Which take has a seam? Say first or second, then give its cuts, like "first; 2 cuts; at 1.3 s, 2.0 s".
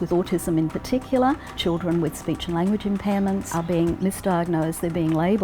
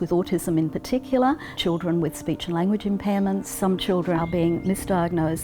first; 1 cut; at 3.6 s